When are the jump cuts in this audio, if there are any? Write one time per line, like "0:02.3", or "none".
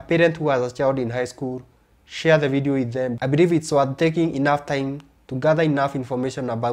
0:03.2

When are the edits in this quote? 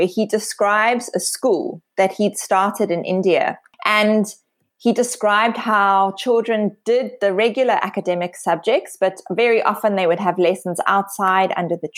0:03.7

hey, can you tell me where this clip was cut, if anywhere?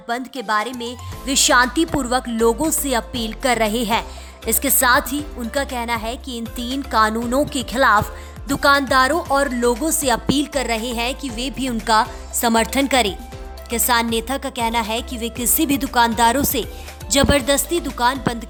none

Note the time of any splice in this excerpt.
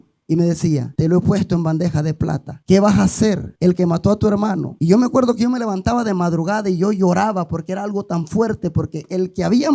0:00.9
0:02.5
0:03.5
0:04.7

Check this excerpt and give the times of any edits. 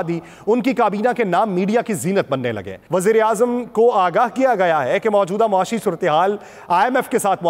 0:02.7

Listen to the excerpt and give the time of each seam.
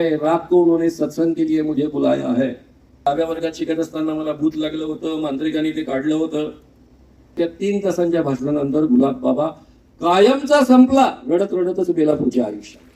0:03.1
0:07.4

